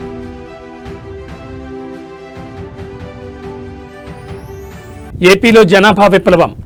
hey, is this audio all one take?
yes; 0 cuts

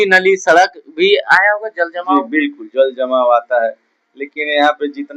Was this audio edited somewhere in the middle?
no; 0 cuts

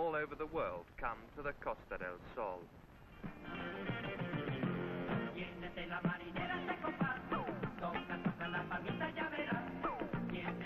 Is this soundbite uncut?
yes; 0 cuts

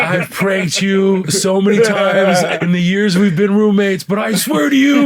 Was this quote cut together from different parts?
yes; 1 cut; at 2.5 s

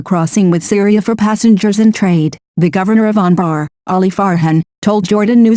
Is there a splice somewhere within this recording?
yes; 1 cut; at 1.1 s

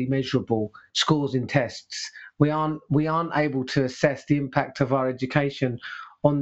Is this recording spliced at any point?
no; 0 cuts

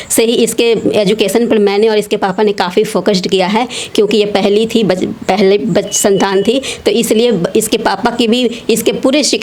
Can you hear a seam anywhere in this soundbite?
no; 0 cuts

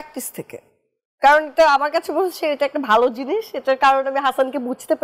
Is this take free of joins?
yes; 0 cuts

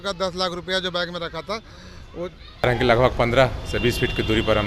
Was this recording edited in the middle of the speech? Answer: yes; 1 cut; at 2.6 s

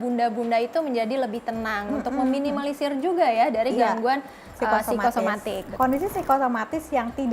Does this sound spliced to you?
yes; 1 cut; at 5.6 s

